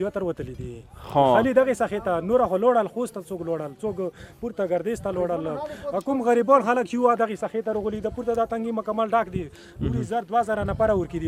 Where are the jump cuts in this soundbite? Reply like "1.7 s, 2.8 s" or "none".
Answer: none